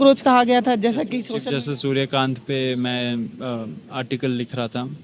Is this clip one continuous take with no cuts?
no; 1 cut; at 1.2 s

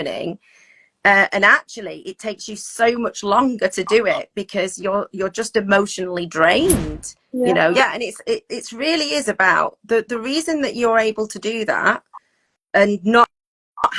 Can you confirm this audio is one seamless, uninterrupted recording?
no; 1 cut; at 7.7 s

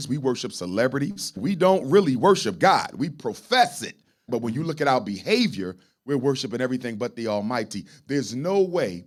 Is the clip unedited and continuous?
yes; 0 cuts

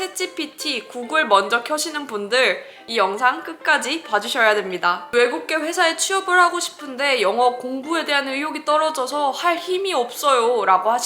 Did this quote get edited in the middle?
yes; 2 cuts; at 2.8 s, 5.0 s

